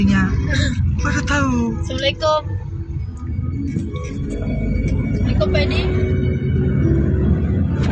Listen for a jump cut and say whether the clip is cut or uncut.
uncut